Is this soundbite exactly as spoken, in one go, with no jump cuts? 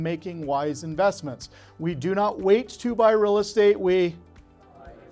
yes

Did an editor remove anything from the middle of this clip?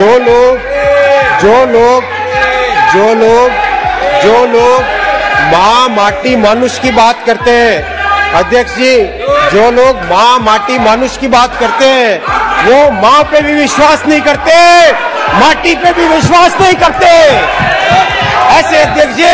no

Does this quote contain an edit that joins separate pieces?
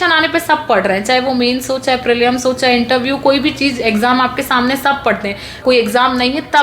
yes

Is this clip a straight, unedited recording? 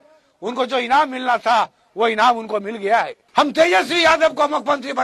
no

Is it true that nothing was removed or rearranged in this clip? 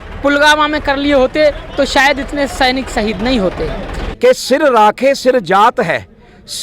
no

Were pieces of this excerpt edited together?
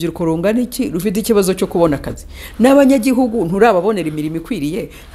no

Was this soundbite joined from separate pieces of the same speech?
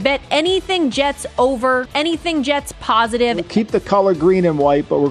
yes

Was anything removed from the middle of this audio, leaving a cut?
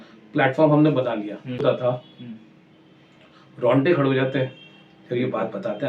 yes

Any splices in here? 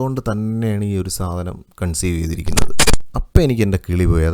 yes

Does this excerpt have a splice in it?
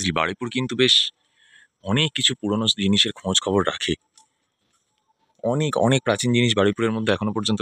no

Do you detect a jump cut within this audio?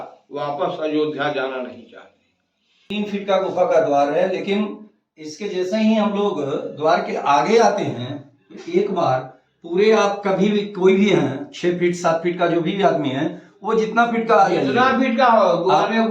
yes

